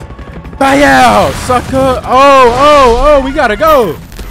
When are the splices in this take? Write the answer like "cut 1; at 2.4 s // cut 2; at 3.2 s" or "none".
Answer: none